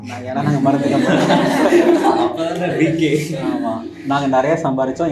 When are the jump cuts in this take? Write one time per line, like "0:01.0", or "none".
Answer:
none